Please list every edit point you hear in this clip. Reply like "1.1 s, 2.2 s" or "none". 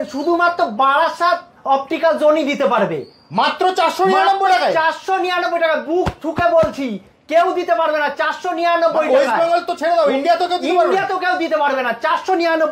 none